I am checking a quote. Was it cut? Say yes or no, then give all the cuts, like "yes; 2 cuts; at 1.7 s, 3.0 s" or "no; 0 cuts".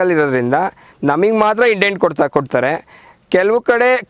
no; 0 cuts